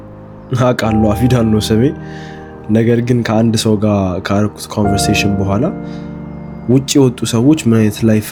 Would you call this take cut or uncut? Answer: uncut